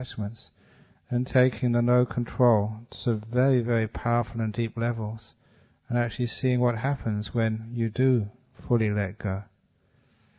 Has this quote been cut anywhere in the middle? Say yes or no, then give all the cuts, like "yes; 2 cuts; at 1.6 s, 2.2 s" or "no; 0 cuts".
no; 0 cuts